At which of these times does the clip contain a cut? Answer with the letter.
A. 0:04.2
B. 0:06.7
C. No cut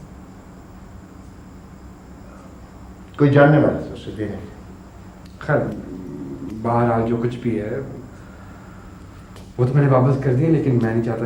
C